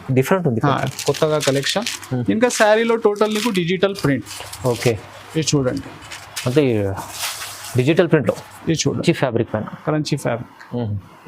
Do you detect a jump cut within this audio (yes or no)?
yes